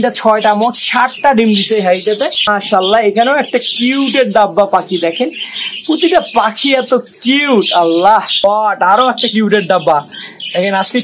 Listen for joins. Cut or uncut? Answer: cut